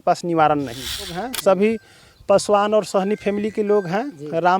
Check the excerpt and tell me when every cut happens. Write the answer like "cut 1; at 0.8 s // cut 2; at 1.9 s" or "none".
cut 1; at 1.2 s